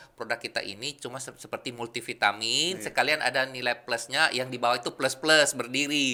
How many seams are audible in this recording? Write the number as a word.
zero